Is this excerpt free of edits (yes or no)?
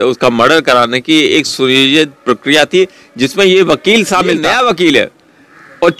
no